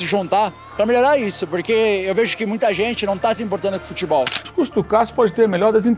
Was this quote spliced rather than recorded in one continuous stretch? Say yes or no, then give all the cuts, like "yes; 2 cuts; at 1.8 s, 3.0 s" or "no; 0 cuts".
yes; 1 cut; at 4.5 s